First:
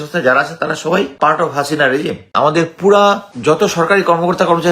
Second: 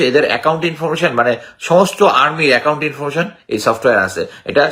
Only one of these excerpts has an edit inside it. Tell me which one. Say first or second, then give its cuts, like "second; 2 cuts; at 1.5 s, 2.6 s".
first; 3 cuts; at 1.1 s, 2.3 s, 3.3 s